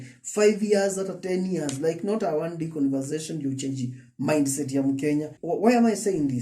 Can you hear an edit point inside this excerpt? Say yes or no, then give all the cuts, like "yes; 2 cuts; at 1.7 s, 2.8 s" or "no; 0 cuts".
yes; 1 cut; at 5.4 s